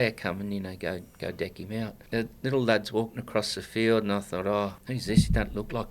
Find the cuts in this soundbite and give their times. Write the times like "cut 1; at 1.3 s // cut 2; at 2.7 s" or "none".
cut 1; at 2.0 s // cut 2; at 4.9 s